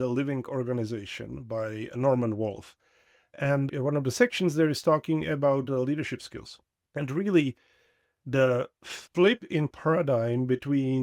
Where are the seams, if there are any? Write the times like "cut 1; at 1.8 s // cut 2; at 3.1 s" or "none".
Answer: cut 1; at 1.9 s // cut 2; at 3.7 s